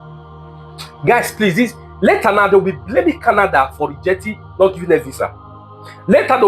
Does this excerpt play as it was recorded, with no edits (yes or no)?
no